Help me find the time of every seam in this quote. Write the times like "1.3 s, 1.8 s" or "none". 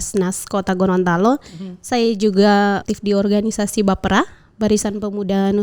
2.8 s